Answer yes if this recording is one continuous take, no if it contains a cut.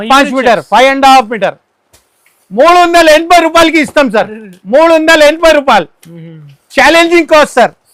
yes